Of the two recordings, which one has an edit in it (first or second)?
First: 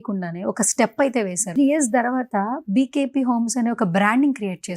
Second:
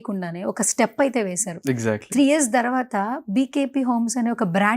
first